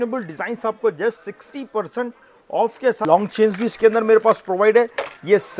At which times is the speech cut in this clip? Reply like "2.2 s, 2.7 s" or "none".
3.0 s